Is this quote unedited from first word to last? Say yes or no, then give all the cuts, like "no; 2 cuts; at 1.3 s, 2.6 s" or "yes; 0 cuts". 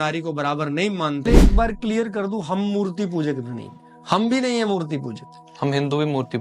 no; 1 cut; at 1.5 s